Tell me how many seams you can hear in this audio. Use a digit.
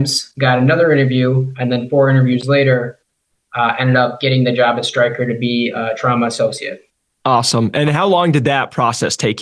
0